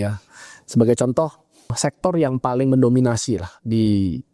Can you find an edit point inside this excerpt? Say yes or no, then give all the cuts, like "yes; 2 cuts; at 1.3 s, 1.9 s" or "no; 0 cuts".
no; 0 cuts